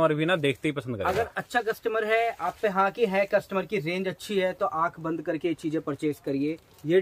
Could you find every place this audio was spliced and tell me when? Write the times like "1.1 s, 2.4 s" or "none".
none